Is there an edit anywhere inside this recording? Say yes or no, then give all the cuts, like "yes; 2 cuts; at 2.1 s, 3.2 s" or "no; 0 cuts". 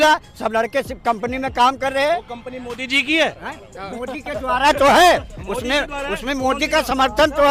no; 0 cuts